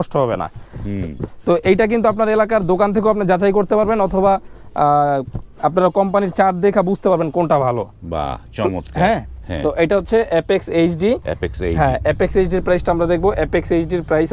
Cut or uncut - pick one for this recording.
uncut